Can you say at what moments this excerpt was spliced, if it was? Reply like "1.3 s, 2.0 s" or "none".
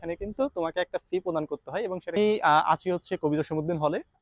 2.2 s